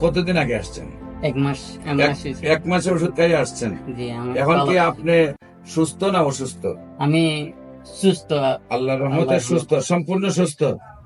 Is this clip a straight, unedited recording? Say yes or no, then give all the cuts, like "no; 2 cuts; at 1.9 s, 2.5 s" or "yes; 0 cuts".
yes; 0 cuts